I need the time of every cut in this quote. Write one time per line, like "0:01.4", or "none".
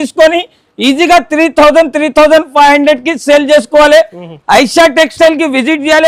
none